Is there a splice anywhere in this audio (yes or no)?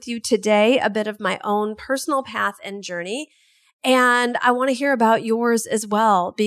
no